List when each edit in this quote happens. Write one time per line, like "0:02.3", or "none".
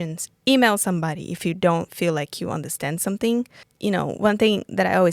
0:03.6